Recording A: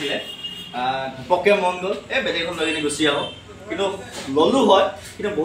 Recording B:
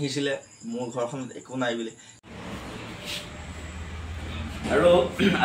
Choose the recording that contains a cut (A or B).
B